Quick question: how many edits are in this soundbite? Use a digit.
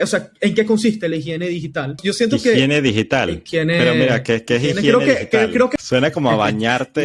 3